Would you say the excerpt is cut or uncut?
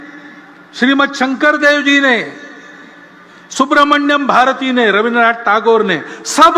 uncut